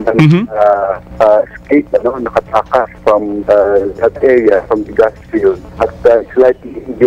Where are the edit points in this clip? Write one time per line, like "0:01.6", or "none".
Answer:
0:01.0
0:02.9
0:05.7